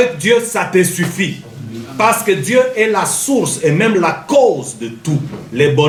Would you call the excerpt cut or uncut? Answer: uncut